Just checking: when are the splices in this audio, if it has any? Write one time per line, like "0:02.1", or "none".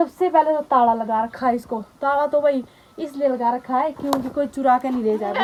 none